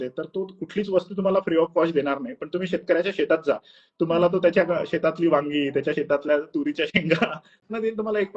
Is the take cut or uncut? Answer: cut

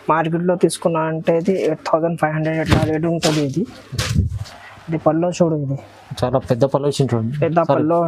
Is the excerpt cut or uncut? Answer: uncut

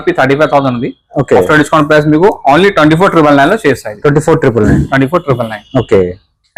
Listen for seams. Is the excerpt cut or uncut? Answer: uncut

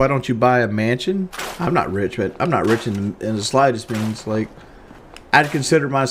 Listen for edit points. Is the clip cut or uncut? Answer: uncut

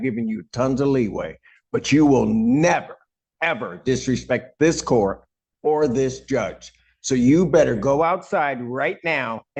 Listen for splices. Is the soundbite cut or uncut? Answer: uncut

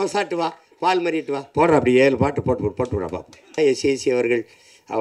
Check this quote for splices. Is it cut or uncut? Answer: cut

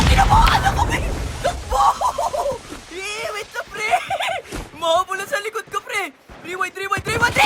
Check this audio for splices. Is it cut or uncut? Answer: uncut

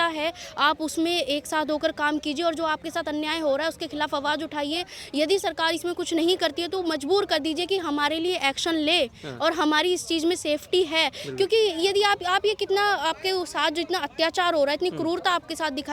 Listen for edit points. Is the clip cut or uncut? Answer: uncut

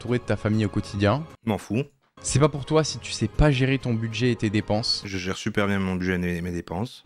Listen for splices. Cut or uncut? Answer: uncut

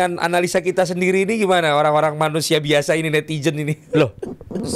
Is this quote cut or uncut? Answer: uncut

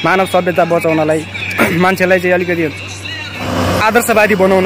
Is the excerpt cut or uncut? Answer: uncut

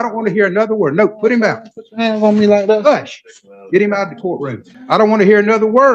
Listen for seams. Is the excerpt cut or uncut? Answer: cut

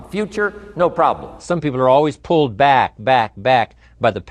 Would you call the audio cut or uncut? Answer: cut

